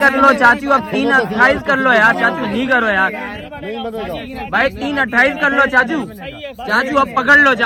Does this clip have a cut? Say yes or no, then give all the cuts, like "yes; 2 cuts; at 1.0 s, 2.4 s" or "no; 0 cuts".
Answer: no; 0 cuts